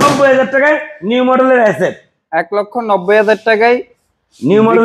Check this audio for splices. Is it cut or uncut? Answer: uncut